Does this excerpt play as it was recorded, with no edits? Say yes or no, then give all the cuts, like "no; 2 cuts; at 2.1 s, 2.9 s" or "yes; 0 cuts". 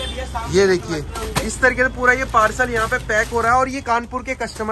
yes; 0 cuts